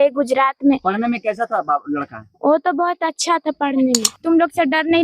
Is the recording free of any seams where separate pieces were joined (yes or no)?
no